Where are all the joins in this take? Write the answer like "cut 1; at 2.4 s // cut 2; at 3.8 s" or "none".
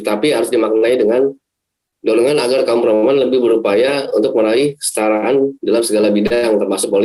none

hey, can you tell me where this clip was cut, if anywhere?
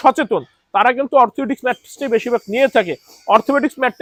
none

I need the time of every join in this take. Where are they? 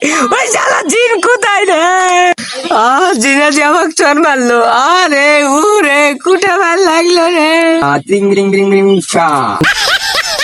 cut 1; at 7.8 s

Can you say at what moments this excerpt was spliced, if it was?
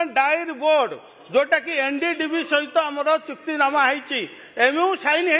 none

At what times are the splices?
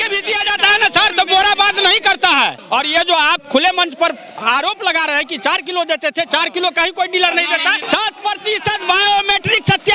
cut 1; at 2.6 s // cut 2; at 7.8 s

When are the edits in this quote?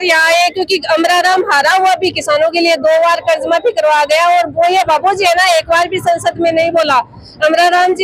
none

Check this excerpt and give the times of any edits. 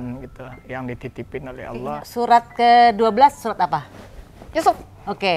cut 1; at 1.8 s

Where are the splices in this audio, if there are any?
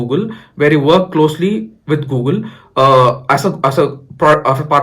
none

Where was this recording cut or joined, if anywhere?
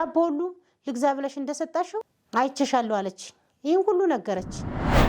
cut 1; at 2.2 s

